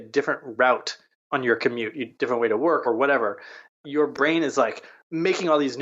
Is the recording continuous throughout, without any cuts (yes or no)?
no